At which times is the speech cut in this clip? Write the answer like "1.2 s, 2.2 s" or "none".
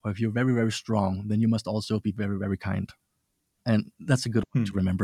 none